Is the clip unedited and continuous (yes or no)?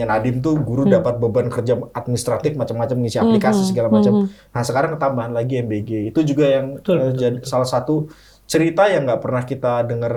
yes